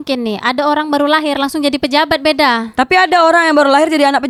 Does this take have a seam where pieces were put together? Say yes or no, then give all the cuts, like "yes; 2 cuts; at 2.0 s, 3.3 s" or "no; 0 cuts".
no; 0 cuts